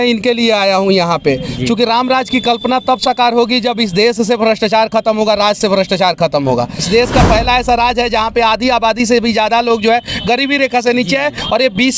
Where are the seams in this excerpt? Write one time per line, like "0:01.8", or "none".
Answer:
0:06.8